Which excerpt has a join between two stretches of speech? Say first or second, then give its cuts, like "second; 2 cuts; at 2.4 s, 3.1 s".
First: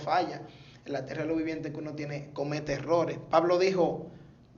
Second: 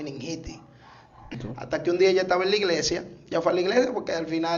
second; 1 cut; at 1.4 s